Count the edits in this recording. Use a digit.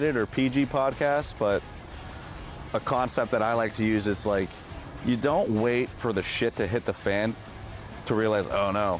0